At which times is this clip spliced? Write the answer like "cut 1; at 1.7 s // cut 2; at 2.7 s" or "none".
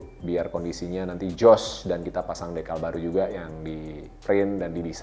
none